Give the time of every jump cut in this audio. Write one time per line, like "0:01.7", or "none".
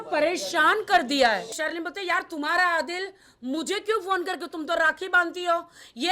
0:01.6